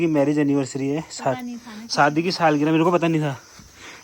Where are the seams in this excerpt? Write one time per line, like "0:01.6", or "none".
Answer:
none